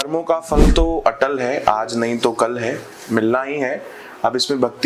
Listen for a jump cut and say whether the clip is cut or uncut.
uncut